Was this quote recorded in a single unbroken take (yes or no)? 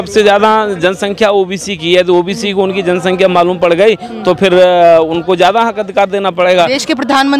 yes